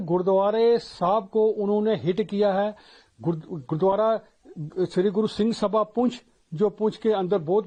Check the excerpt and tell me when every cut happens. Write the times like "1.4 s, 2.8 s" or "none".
none